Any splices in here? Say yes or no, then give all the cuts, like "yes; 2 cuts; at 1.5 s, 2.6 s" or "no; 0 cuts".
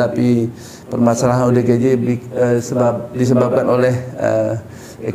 no; 0 cuts